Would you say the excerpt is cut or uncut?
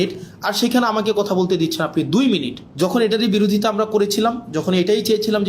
cut